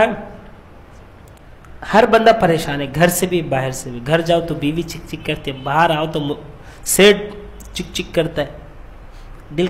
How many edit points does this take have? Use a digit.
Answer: 1